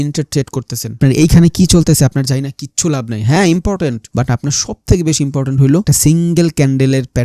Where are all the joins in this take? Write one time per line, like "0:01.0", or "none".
0:01.0
0:04.0
0:05.8